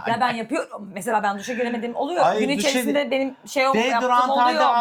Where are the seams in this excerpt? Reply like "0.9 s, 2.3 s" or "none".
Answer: none